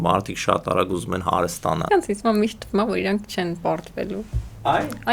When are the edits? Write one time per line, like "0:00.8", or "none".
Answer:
0:01.8